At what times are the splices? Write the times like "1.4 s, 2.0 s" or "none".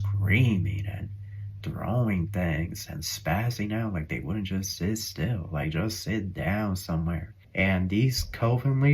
7.4 s